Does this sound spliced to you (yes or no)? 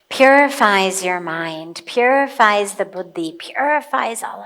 no